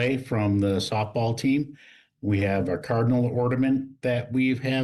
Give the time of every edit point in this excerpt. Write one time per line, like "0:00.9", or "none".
none